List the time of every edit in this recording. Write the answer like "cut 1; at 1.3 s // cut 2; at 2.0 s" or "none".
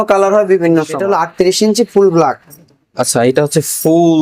cut 1; at 0.9 s